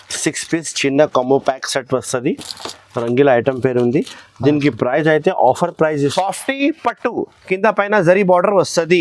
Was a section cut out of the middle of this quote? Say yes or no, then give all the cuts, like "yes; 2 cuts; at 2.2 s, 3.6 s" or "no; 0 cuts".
yes; 1 cut; at 6.1 s